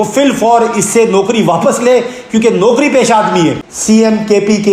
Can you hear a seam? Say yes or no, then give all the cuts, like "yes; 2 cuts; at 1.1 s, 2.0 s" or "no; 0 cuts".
yes; 1 cut; at 3.7 s